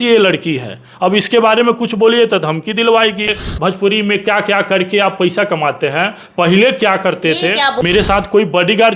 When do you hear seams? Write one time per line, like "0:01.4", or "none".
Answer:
0:03.4
0:07.8